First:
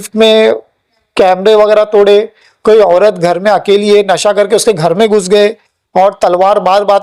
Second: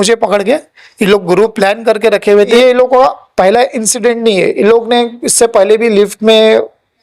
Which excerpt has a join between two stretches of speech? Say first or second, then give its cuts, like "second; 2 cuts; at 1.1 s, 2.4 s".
second; 1 cut; at 2.6 s